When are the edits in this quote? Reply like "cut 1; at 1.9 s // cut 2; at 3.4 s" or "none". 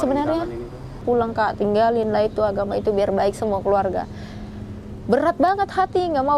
cut 1; at 1.0 s